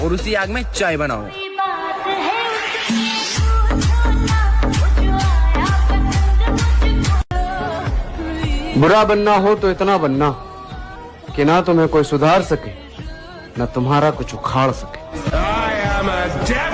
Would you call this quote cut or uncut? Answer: uncut